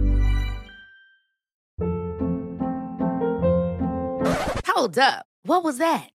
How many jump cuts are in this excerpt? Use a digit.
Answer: 1